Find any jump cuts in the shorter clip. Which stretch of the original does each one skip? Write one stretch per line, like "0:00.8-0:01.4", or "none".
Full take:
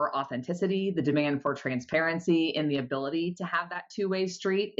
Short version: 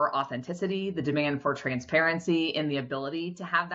none